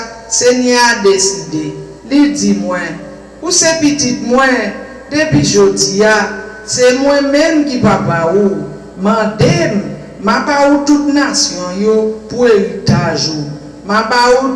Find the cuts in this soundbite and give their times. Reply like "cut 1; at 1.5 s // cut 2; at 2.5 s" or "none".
none